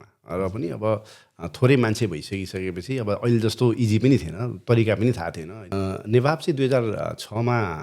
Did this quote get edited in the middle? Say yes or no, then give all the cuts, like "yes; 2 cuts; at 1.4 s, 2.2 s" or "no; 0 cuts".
yes; 1 cut; at 5.6 s